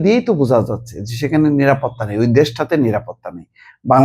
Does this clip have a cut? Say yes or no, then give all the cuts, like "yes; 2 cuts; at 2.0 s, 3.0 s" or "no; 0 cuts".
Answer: no; 0 cuts